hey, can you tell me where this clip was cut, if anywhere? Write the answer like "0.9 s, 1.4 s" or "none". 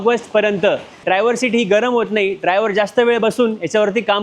1.0 s